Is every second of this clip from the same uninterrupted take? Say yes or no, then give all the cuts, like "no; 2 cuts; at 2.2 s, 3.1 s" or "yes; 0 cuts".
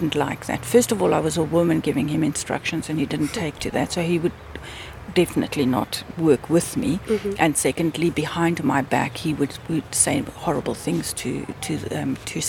yes; 0 cuts